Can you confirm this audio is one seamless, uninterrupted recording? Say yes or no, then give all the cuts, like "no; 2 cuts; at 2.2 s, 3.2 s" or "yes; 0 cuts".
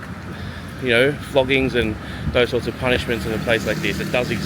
yes; 0 cuts